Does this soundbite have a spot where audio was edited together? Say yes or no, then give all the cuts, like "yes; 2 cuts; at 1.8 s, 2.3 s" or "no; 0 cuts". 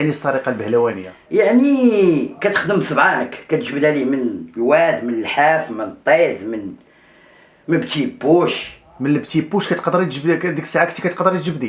yes; 1 cut; at 1.1 s